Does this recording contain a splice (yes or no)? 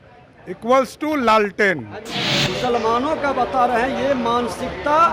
yes